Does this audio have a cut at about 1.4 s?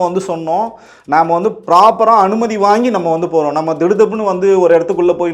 no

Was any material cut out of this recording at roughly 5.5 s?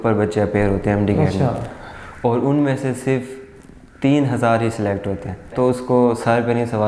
yes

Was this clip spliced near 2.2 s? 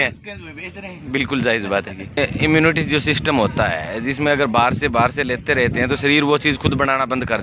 yes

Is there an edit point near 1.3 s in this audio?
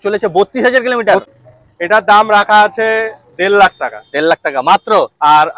yes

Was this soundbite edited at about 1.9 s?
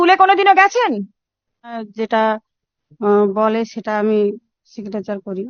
yes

